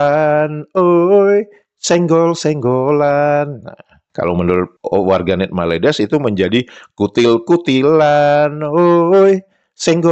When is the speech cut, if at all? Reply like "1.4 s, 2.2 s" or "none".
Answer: none